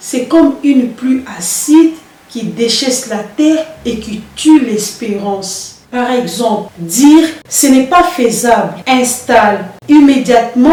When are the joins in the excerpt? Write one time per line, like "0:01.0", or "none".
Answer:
none